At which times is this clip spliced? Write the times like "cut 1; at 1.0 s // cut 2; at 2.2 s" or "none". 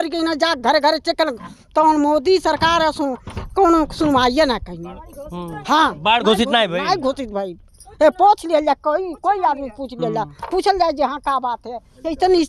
none